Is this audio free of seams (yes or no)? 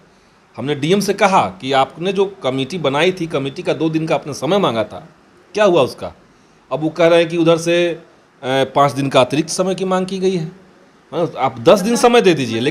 yes